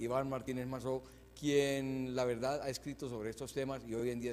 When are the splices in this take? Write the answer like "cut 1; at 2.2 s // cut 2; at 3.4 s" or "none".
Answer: cut 1; at 1.6 s